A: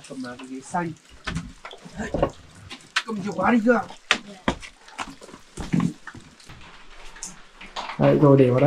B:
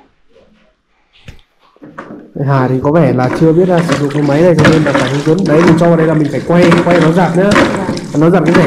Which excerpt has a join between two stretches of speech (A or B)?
A